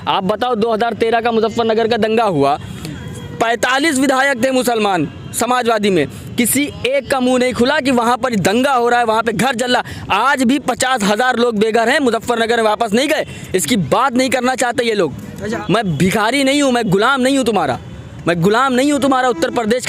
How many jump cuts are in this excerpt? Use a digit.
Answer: 0